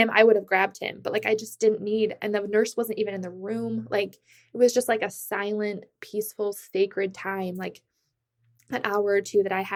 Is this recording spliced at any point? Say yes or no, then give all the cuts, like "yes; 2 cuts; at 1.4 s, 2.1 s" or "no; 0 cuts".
no; 0 cuts